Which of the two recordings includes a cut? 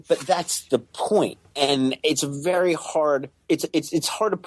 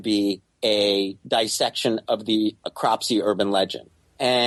first; 1 cut; at 1.4 s

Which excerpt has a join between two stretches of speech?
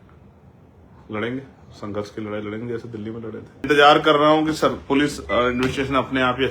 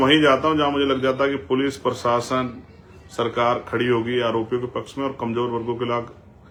first; 1 cut; at 3.6 s

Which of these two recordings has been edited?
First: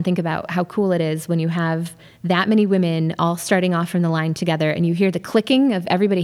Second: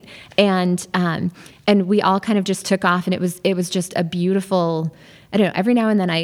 second; 1 cut; at 1.4 s

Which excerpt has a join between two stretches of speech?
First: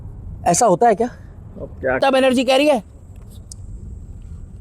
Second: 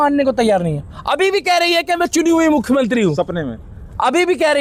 first; 1 cut; at 2.0 s

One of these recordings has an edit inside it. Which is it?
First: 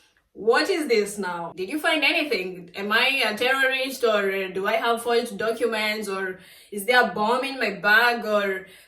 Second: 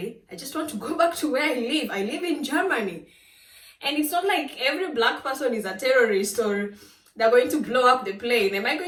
first; 1 cut; at 1.5 s

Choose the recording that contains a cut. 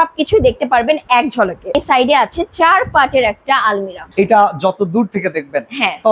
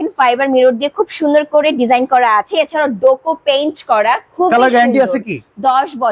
first; 2 cuts; at 1.8 s, 4.0 s

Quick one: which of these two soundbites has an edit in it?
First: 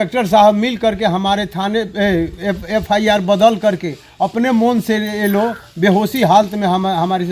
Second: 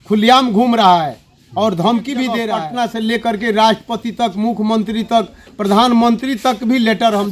second; 1 cut; at 2.5 s

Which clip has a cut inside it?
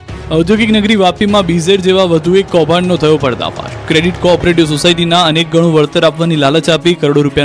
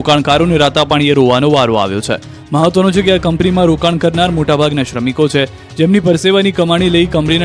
second; 1 cut; at 4.4 s

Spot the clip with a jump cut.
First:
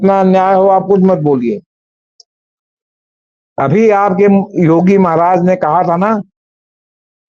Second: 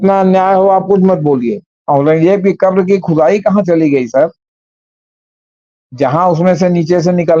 second; 1 cut; at 1.7 s

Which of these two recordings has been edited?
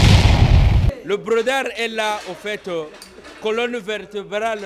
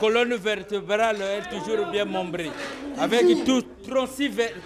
first; 1 cut; at 0.9 s

